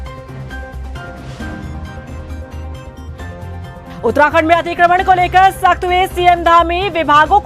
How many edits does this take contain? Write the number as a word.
one